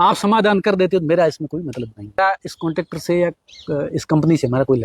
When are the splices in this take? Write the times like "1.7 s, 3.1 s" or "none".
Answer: 2.2 s